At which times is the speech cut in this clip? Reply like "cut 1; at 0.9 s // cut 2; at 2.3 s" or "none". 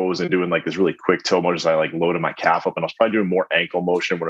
none